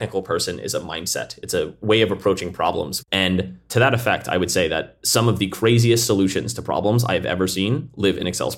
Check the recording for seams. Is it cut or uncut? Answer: uncut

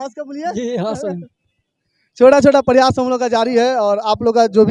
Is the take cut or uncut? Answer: uncut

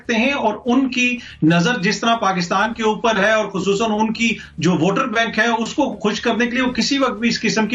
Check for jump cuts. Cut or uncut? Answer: uncut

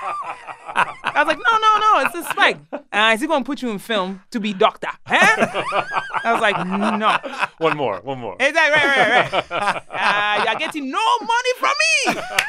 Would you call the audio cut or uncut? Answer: uncut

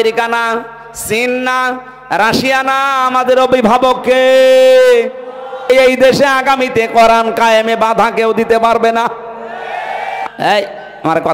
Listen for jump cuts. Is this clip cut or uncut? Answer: cut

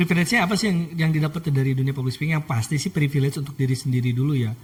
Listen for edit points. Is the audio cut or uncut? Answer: uncut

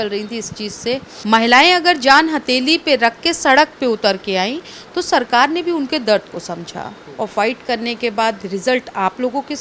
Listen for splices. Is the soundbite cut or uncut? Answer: cut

